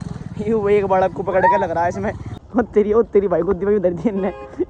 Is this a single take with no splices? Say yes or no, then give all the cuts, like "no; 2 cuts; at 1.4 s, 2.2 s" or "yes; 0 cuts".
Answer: no; 1 cut; at 2.2 s